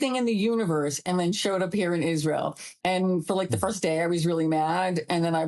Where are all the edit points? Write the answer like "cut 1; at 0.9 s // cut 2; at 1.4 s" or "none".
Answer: cut 1; at 2.7 s